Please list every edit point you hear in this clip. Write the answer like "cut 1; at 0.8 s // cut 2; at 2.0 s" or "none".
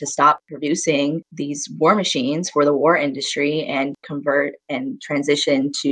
none